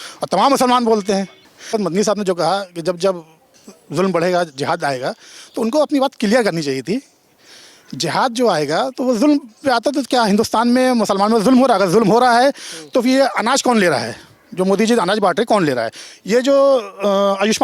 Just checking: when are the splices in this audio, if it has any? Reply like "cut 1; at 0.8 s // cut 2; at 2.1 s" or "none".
cut 1; at 1.7 s

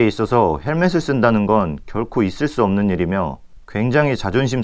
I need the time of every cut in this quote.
none

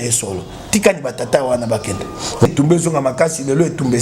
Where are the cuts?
cut 1; at 2.5 s

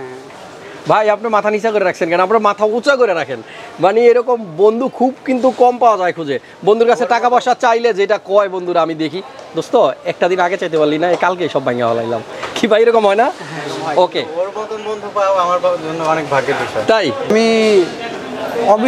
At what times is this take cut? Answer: cut 1; at 17.3 s

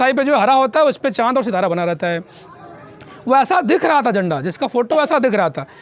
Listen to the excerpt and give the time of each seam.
none

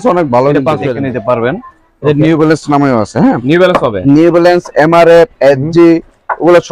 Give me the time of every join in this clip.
cut 1; at 0.9 s

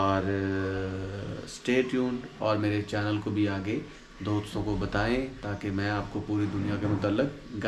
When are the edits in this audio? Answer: none

